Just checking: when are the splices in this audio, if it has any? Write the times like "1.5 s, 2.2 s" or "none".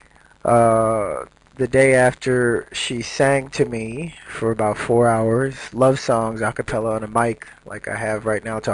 3.5 s